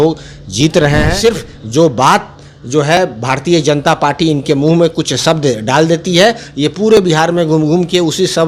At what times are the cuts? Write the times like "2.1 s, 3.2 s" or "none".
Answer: 1.1 s